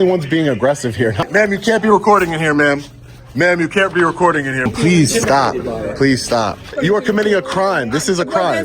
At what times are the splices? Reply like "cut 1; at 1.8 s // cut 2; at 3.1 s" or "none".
cut 1; at 1.2 s // cut 2; at 4.7 s // cut 3; at 6.7 s